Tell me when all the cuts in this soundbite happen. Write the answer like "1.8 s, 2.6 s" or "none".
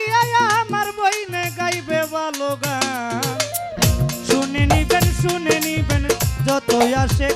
none